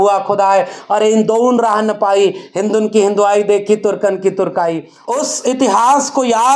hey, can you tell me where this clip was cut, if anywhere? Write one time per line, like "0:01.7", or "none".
0:04.9